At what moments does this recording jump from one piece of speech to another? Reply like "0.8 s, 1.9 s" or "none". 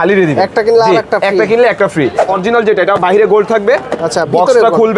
2.3 s